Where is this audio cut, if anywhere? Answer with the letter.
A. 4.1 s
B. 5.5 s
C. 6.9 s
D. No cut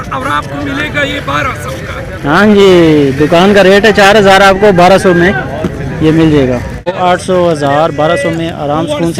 C